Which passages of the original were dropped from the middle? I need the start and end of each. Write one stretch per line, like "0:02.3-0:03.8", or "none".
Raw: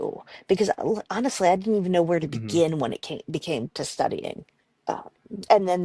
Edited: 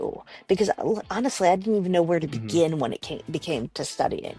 none

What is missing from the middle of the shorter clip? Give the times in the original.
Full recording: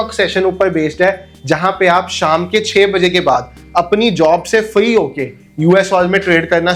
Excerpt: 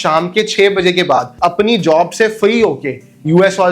0:03.5-0:03.6

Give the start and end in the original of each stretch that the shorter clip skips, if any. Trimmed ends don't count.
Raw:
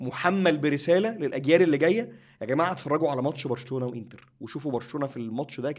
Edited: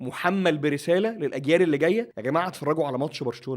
0:02.1-0:02.4

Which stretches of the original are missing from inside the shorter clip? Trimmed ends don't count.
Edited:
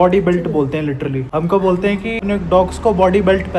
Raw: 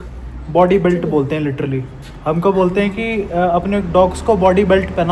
0:01.8-0:02.1
0:03.1-0:03.6

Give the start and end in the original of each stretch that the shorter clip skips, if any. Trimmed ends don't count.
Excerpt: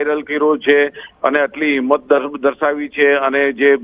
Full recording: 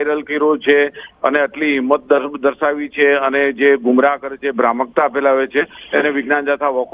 none

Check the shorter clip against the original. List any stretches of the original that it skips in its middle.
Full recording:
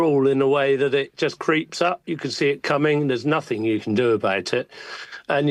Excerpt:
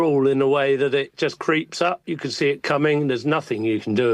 none

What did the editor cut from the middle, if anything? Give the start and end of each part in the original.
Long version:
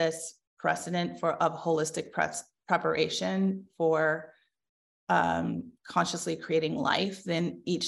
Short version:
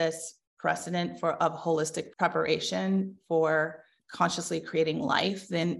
0:02.0-0:02.5
0:04.5-0:05.7

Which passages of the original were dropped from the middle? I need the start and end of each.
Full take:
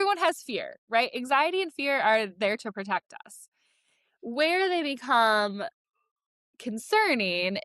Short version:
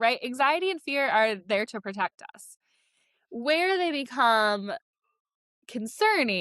none

